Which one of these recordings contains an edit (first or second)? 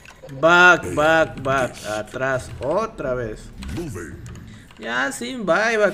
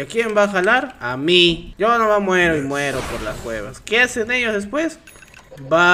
second